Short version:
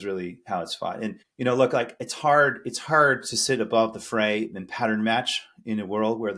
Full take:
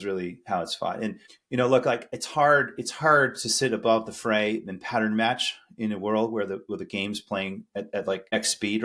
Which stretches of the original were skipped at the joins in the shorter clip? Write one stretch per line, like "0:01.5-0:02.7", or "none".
0:01.2-0:01.4